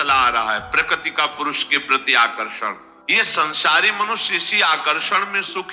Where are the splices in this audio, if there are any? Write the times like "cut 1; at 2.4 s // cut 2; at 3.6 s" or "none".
cut 1; at 2.9 s